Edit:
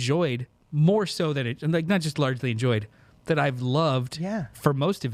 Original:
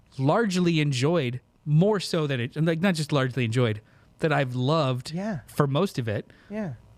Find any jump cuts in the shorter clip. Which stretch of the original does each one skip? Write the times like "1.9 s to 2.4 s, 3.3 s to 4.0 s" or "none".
none